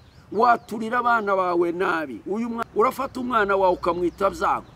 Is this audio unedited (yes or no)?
no